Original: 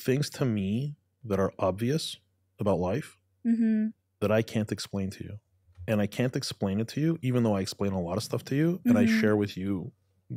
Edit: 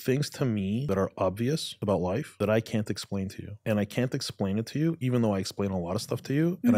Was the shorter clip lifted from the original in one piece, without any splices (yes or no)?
no